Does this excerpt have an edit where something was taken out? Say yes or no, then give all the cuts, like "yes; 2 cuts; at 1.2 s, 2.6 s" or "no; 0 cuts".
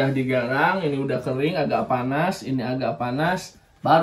no; 0 cuts